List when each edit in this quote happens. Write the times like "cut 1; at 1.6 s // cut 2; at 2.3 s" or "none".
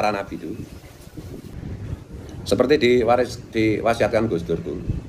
cut 1; at 1.5 s